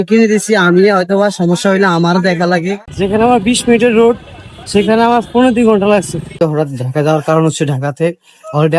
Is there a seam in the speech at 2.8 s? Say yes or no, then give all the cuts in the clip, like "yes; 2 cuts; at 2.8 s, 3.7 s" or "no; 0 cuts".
yes; 2 cuts; at 2.8 s, 6.3 s